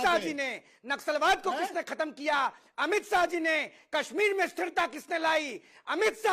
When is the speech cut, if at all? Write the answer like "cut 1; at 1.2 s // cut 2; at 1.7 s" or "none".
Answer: none